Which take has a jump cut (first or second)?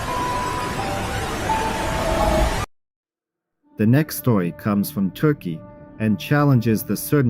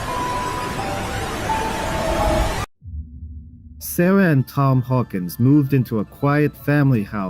second